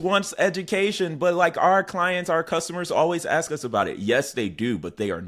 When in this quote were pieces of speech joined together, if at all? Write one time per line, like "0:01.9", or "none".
none